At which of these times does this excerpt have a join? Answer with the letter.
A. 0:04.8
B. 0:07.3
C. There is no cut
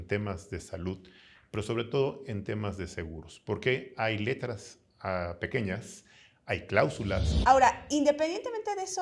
B